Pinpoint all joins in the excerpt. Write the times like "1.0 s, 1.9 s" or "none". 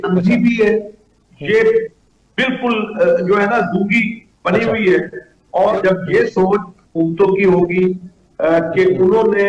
5.8 s